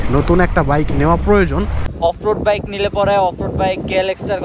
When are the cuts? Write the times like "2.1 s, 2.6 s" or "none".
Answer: 1.8 s